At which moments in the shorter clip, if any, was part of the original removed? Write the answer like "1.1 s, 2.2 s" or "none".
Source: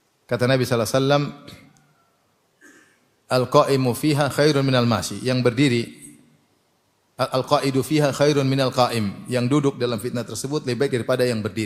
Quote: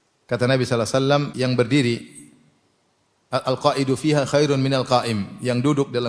1.3 s